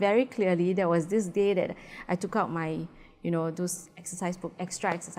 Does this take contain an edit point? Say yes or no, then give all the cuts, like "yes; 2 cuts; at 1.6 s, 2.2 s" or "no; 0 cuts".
no; 0 cuts